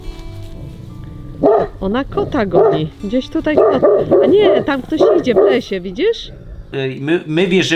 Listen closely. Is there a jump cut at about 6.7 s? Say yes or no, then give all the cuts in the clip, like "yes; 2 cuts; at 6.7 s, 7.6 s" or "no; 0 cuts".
yes; 1 cut; at 6.7 s